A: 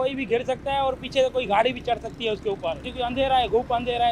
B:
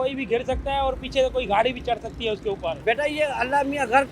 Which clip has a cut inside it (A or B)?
B